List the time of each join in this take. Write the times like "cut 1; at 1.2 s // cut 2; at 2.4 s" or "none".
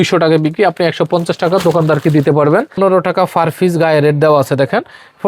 cut 1; at 2.8 s